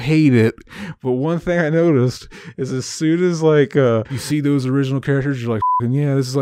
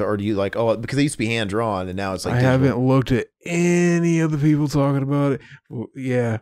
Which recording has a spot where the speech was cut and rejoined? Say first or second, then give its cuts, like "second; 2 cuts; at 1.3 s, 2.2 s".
first; 1 cut; at 4.1 s